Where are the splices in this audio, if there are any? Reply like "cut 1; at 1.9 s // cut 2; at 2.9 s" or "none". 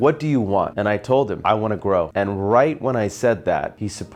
none